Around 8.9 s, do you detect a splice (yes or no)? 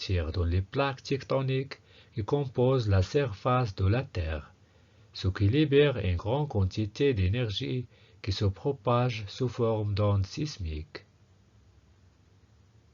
yes